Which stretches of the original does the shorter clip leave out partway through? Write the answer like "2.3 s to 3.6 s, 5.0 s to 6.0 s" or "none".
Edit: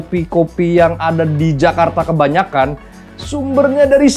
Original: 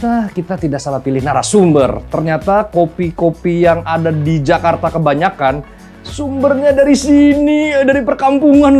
none